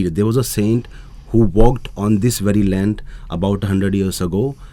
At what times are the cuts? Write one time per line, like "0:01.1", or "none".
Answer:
none